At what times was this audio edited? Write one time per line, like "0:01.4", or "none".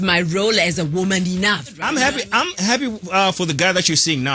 0:01.8